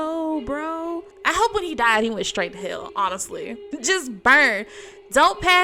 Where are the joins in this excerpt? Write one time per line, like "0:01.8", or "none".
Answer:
0:01.1
0:03.6